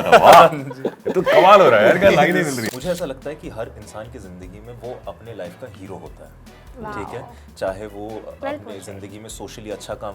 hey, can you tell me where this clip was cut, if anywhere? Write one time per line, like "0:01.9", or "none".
0:02.5